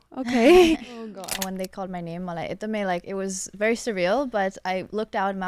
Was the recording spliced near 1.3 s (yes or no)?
yes